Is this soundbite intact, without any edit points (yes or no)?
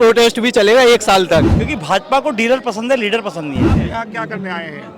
no